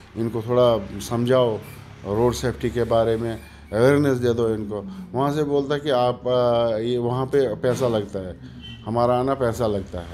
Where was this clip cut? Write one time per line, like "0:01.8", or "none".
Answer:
none